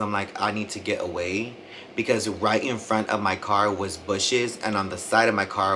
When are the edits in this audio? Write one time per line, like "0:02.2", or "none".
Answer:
none